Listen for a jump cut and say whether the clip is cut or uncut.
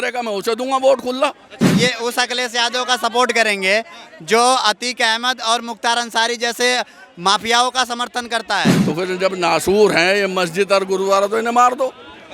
cut